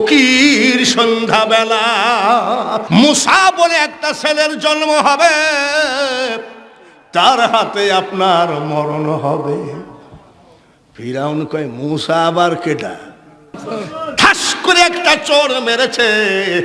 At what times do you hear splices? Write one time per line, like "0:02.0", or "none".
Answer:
0:02.8
0:13.5